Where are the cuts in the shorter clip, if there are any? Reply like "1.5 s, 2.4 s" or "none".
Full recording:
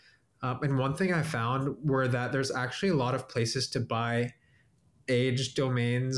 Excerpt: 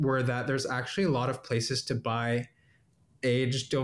none